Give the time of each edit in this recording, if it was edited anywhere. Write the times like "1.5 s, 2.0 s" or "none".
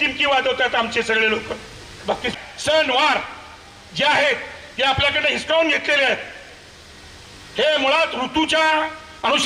2.3 s